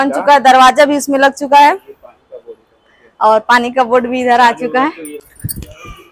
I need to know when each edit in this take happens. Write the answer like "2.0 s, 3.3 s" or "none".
5.2 s